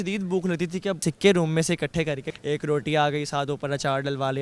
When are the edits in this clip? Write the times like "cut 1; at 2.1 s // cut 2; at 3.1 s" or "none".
cut 1; at 1.1 s // cut 2; at 2.3 s